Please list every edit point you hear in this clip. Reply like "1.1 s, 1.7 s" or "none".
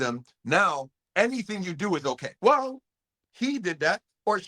2.3 s